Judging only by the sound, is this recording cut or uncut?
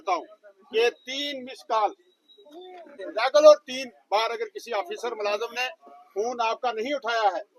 cut